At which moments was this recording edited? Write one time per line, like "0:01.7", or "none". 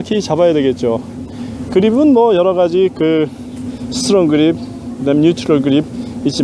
0:05.1